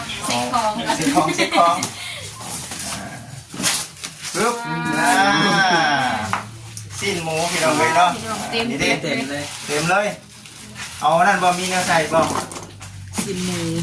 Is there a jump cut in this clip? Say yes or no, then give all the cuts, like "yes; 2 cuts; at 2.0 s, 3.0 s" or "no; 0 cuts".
no; 0 cuts